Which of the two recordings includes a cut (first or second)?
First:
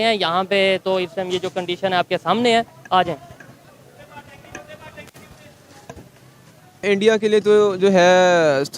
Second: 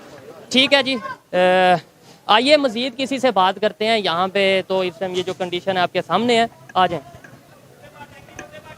first